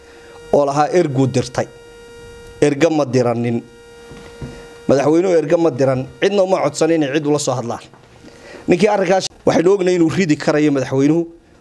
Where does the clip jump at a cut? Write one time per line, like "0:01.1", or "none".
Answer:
0:09.2